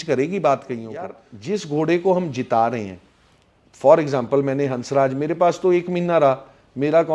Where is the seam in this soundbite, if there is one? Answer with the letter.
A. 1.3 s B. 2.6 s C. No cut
A